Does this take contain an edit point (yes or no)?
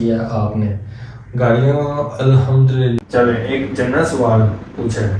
yes